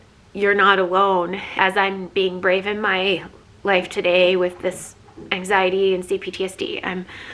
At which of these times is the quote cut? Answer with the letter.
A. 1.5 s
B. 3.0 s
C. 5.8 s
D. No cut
A